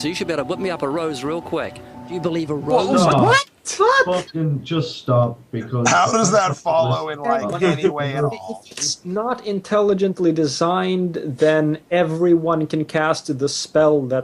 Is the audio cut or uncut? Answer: uncut